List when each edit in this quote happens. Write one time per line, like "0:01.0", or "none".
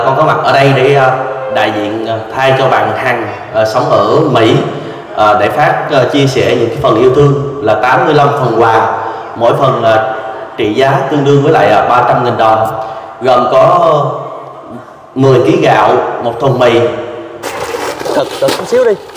0:17.5